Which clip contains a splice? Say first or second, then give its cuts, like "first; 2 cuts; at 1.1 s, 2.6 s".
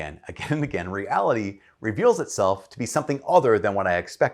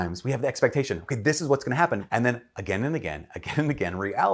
second; 1 cut; at 2.0 s